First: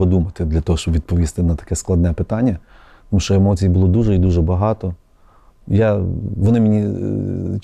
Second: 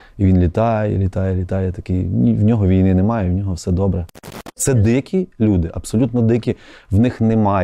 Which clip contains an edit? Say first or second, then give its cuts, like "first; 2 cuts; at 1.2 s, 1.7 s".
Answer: second; 1 cut; at 4.7 s